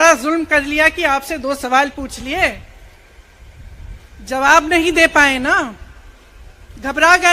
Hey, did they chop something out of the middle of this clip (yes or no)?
no